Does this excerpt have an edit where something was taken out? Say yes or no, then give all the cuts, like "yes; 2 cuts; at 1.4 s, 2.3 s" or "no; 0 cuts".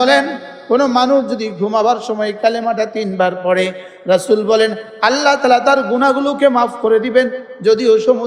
no; 0 cuts